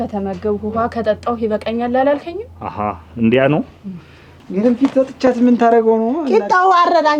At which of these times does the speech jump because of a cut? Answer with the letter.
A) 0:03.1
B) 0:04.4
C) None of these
B